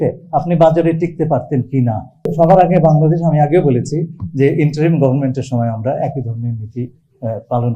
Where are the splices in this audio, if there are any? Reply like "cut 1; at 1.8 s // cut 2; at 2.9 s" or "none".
cut 1; at 2.1 s